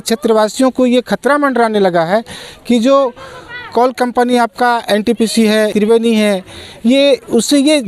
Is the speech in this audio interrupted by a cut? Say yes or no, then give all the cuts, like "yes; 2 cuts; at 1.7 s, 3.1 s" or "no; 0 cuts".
yes; 1 cut; at 5.7 s